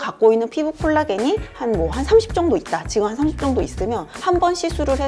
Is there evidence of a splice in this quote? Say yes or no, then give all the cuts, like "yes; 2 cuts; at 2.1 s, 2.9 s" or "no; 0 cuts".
no; 0 cuts